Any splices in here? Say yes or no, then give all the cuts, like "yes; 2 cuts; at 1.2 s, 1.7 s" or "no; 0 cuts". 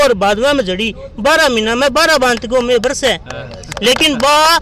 no; 0 cuts